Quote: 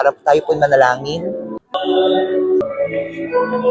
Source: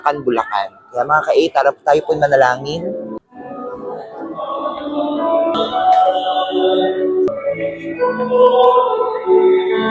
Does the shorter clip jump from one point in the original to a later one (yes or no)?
yes